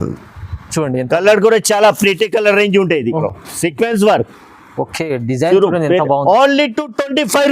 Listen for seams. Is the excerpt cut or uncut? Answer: cut